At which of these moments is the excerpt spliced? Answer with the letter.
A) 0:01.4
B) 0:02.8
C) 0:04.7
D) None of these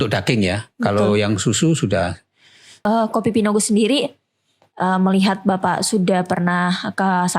B